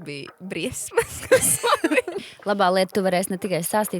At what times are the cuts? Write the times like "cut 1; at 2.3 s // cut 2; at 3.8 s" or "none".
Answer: cut 1; at 2.2 s